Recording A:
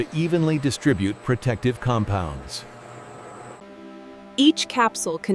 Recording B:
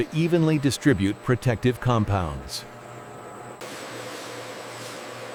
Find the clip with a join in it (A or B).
A